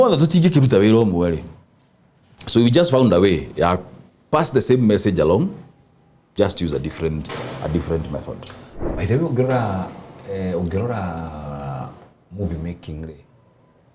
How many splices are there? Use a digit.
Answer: 0